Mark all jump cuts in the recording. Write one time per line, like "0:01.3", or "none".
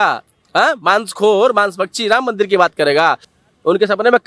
0:03.2